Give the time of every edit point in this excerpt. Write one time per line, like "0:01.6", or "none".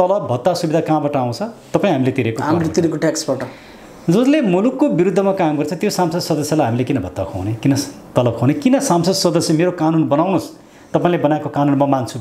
none